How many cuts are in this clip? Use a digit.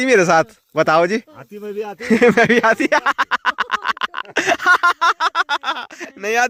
0